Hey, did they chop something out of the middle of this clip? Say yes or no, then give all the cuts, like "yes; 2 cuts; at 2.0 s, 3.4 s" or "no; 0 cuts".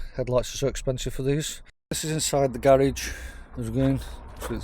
yes; 1 cut; at 2.0 s